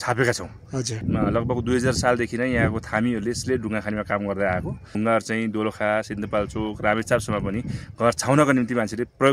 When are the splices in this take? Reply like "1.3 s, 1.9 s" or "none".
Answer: 1.0 s, 4.9 s